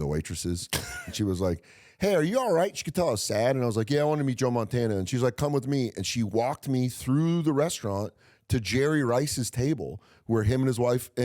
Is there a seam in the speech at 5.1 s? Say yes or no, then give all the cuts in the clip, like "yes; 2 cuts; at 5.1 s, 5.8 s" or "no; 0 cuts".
yes; 2 cuts; at 1.0 s, 5.1 s